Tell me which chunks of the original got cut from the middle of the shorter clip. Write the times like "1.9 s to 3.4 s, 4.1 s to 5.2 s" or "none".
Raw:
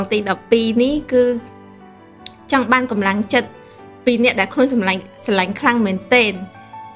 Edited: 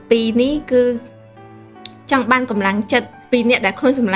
3.6 s to 3.9 s